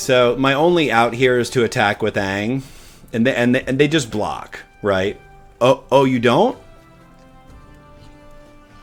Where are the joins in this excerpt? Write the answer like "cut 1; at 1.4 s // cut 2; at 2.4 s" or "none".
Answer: none